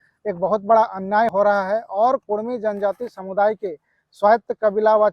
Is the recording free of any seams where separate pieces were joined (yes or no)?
no